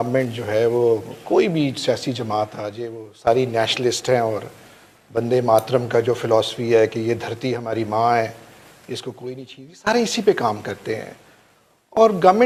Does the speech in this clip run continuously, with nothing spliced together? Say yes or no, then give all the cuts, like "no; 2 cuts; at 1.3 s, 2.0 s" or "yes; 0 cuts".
yes; 0 cuts